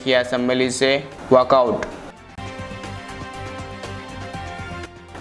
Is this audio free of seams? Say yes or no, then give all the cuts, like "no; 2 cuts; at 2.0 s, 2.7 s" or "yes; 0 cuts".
yes; 0 cuts